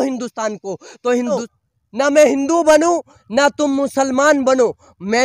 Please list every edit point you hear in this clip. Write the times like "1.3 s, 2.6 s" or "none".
1.5 s